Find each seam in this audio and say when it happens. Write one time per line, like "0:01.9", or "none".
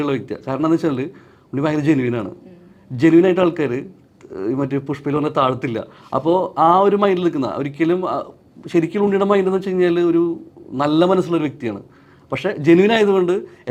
none